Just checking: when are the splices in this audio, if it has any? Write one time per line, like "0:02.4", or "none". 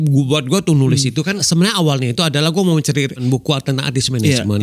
0:01.4
0:03.2